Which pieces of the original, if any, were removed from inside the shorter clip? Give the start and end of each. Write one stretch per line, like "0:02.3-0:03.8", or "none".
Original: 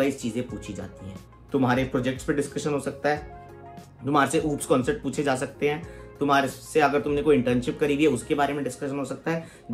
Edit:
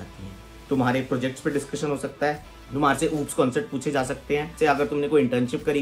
0:03.4-0:03.9
0:05.8-0:06.6